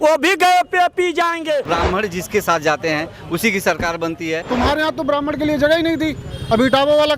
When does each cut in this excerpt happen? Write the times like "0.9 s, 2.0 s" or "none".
1.7 s, 4.4 s